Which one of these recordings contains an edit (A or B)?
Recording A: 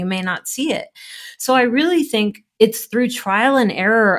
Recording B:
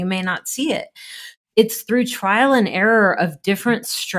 B